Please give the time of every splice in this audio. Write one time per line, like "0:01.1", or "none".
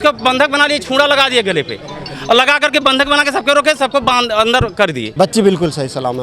0:05.0